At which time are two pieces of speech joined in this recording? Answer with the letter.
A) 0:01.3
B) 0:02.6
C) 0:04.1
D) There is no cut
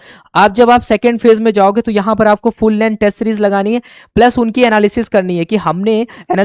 D